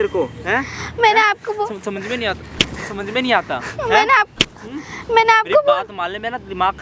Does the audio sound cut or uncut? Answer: uncut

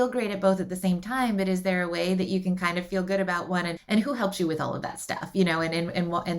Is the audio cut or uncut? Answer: cut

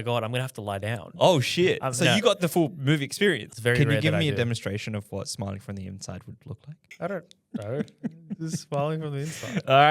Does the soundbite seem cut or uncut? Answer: cut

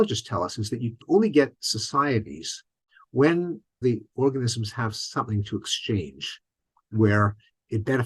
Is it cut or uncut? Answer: cut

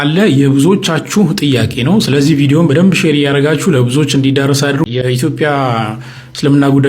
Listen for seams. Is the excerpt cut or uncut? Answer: cut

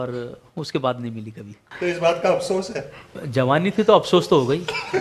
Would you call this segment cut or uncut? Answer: cut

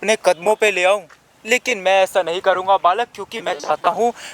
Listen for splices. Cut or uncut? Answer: uncut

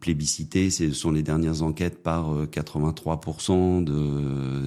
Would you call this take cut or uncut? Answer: uncut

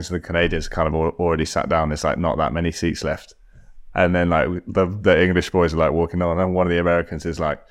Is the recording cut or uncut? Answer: uncut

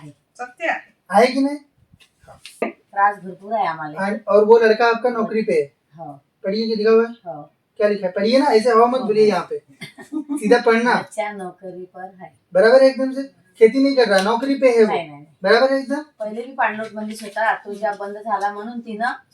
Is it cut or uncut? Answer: cut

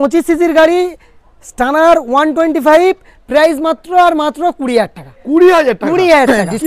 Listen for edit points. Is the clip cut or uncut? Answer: uncut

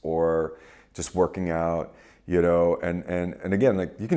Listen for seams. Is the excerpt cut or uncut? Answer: uncut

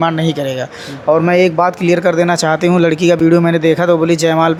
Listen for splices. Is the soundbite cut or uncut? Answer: uncut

